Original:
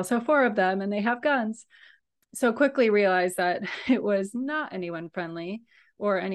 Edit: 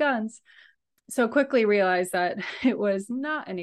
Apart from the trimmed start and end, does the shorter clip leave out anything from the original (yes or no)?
no